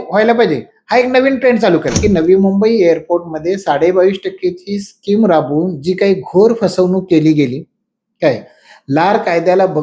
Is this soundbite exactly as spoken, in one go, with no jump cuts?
no; 1 cut; at 2.0 s

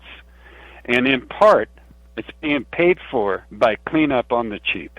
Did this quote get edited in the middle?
yes; 1 cut; at 3.5 s

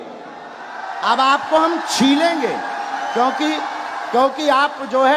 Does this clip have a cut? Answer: no; 0 cuts

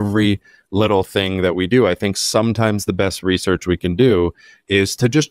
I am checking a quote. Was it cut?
no; 0 cuts

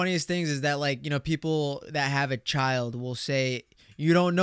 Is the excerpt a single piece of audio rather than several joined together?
yes; 0 cuts

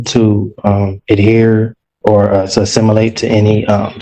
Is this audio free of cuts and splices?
yes; 0 cuts

